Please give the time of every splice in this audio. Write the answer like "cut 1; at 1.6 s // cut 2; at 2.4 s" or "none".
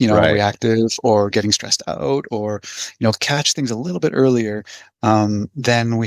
none